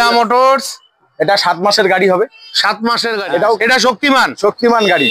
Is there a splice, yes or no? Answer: yes